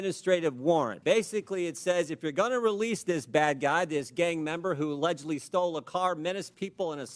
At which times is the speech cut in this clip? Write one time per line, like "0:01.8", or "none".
0:00.9